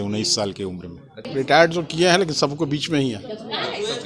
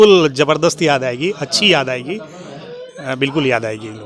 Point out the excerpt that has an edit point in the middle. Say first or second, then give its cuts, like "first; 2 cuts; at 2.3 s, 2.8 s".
first; 1 cut; at 1.3 s